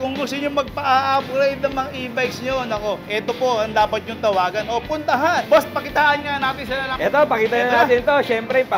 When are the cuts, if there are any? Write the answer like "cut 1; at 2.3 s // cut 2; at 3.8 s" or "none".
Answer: cut 1; at 3.0 s // cut 2; at 5.4 s // cut 3; at 6.9 s

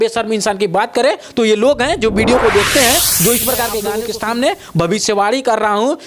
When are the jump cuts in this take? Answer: cut 1; at 4.0 s

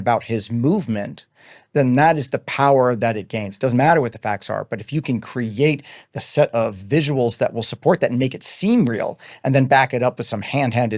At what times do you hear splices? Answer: none

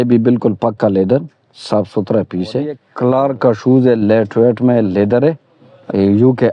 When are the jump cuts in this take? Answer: cut 1; at 2.9 s

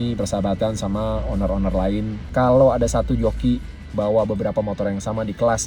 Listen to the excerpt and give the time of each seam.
cut 1; at 2.2 s

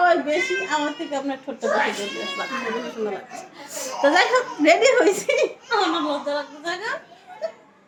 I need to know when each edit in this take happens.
none

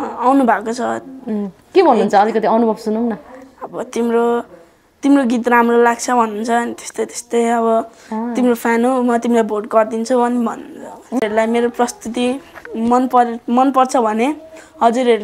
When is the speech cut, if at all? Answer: cut 1; at 11.2 s

